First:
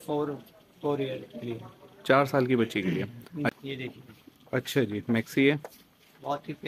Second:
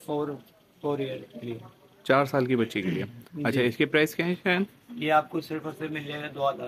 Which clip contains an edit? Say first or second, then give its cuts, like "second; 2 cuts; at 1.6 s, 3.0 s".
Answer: first; 1 cut; at 3.5 s